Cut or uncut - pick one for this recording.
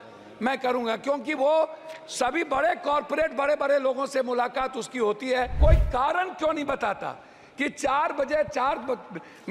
cut